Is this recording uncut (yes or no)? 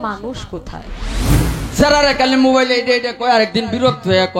no